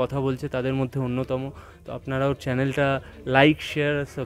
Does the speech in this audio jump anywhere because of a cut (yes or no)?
no